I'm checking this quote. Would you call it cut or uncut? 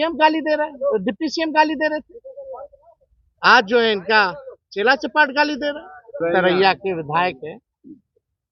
cut